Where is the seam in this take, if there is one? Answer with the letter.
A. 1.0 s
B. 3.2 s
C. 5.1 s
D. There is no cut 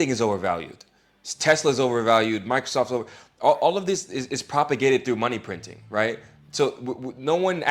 D